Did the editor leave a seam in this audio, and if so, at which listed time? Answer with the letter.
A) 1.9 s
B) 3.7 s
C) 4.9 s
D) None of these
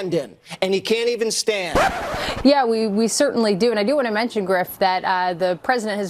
A